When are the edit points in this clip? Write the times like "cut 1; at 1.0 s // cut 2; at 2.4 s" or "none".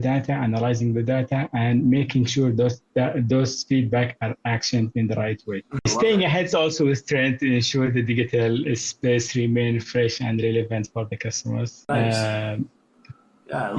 cut 1; at 5.9 s // cut 2; at 11.7 s